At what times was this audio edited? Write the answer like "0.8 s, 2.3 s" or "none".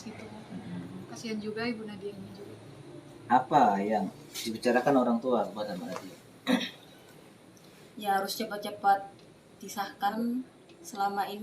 10.1 s